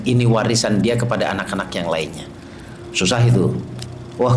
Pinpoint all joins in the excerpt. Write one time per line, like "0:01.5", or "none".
none